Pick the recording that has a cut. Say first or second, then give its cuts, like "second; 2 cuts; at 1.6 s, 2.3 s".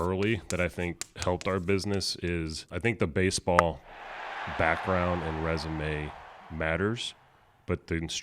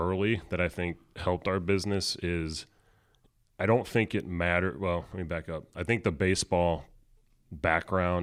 first; 1 cut; at 2.6 s